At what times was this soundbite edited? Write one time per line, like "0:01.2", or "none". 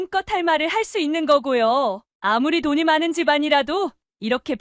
0:02.1